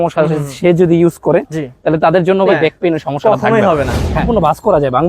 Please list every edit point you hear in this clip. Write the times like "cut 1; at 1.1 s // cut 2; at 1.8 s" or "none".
cut 1; at 2.5 s // cut 2; at 4.2 s

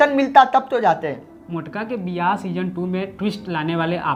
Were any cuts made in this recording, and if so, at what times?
none

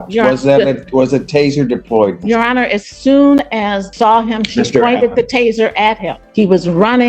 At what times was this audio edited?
cut 1; at 3.8 s // cut 2; at 6.2 s

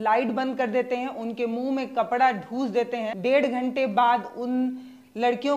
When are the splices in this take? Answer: cut 1; at 3.1 s

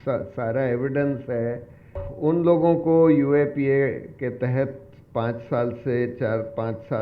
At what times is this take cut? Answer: cut 1; at 2.1 s

